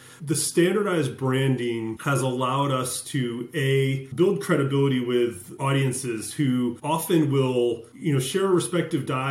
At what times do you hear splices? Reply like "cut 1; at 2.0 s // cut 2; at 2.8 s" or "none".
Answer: cut 1; at 2.0 s // cut 2; at 4.0 s // cut 3; at 5.5 s // cut 4; at 6.8 s // cut 5; at 7.9 s

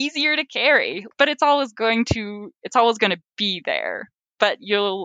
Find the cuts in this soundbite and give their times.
cut 1; at 1.1 s

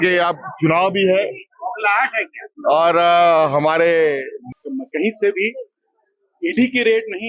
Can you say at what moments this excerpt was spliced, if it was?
cut 1; at 4.3 s

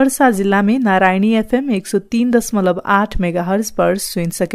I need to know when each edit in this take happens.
none

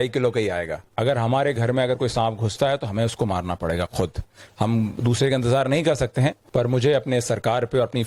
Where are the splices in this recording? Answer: cut 1; at 0.9 s // cut 2; at 6.4 s

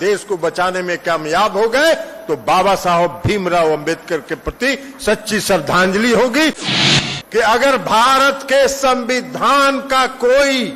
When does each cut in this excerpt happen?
cut 1; at 6.7 s

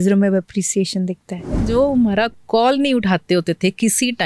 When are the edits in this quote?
cut 1; at 1.6 s

